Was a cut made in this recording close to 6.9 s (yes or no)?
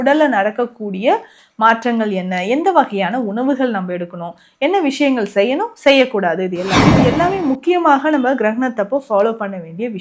yes